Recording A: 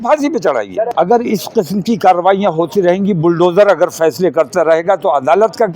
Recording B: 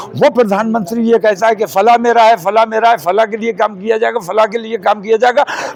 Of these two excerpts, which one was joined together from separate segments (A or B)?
A